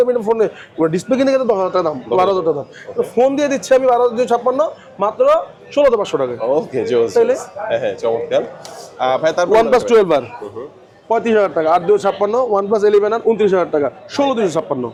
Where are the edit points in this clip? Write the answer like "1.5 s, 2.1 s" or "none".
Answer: none